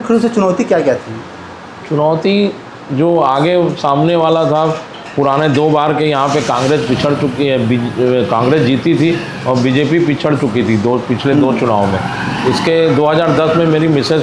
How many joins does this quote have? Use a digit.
0